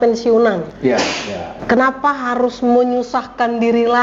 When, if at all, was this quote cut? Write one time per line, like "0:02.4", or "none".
0:01.1